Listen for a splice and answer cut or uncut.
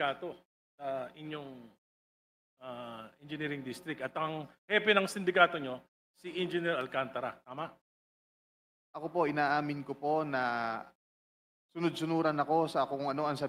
uncut